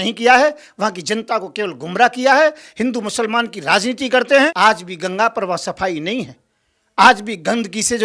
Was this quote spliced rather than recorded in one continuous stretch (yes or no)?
yes